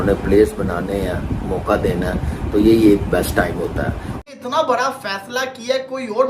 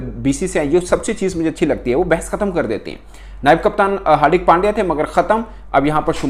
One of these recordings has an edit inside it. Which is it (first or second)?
first